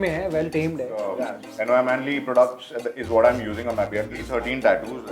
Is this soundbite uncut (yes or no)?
no